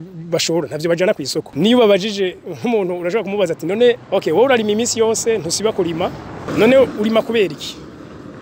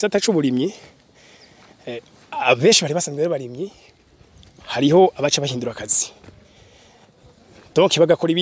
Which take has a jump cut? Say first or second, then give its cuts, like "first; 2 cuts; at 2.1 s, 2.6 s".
first; 3 cuts; at 1.5 s, 4.0 s, 6.5 s